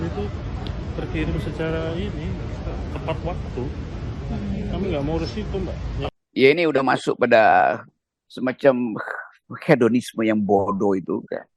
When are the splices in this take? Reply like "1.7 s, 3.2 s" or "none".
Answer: 6.1 s

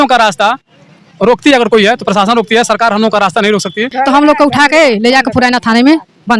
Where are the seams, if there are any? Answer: 3.9 s

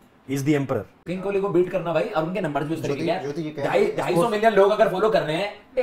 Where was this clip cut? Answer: 0.9 s

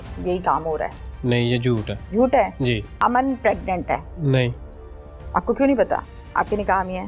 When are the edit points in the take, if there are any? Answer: 2.0 s, 2.9 s, 4.1 s

